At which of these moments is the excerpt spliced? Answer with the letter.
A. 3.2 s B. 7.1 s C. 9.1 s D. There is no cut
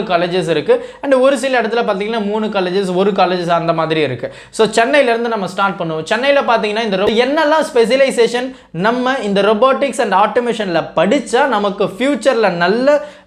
B